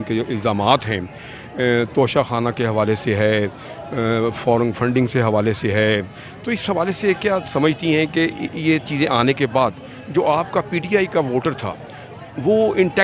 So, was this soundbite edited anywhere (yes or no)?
no